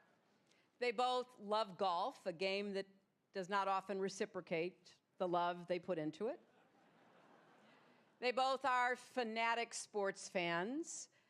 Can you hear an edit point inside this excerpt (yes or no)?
yes